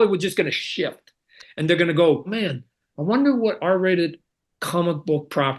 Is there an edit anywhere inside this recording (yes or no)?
yes